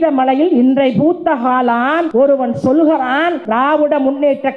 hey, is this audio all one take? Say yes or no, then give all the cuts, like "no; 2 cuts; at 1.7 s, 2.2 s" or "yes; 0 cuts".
no; 2 cuts; at 2.1 s, 3.4 s